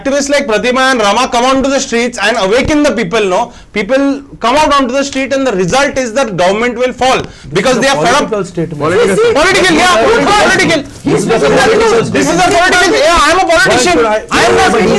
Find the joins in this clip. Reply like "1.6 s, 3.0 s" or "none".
none